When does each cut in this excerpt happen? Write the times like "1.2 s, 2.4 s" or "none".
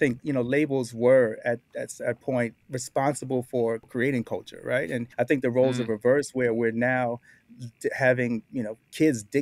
2.6 s, 3.9 s, 5.1 s